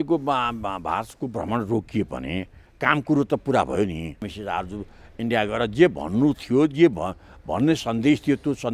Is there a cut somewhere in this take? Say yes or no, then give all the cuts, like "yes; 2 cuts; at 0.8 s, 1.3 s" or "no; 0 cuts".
yes; 1 cut; at 4.3 s